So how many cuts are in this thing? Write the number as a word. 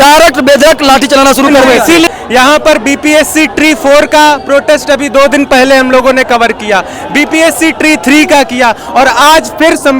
one